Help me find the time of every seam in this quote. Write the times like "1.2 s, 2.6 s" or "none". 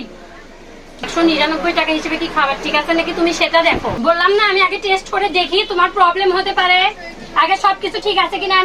1.1 s, 4.0 s